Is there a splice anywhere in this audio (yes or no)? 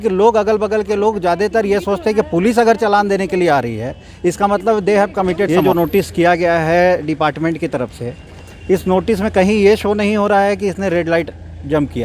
yes